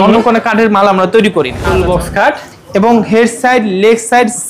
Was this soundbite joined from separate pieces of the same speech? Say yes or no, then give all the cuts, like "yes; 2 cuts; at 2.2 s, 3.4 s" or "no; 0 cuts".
yes; 1 cut; at 1.6 s